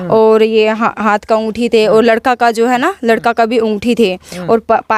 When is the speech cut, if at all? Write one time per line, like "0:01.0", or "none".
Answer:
none